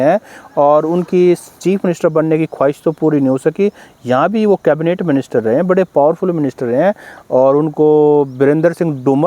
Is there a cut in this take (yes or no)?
no